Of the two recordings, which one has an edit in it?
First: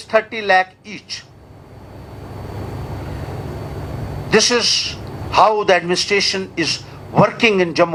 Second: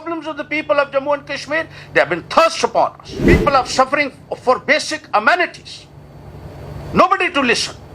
second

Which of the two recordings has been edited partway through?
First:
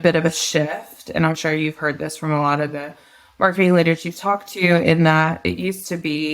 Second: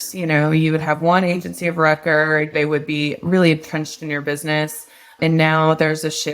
second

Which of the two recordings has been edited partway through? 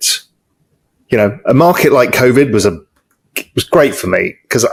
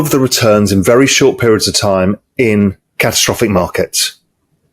second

